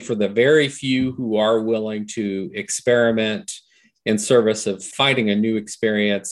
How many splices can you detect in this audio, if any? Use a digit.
1